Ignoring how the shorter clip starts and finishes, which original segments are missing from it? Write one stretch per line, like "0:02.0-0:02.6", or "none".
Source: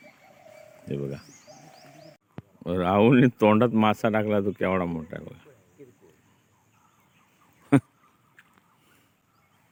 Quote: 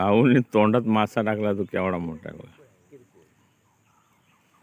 none